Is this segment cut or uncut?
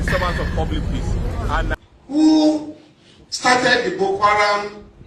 cut